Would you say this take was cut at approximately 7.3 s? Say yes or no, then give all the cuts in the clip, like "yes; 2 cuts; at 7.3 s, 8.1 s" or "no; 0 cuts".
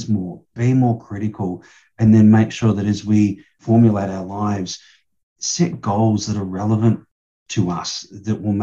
no; 1 cut; at 3.6 s